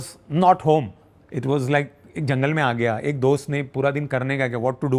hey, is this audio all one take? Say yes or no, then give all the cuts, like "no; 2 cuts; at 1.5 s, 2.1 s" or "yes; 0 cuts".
yes; 0 cuts